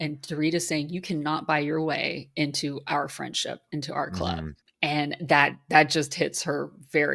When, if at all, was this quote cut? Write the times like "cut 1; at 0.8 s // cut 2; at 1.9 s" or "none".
cut 1; at 4.6 s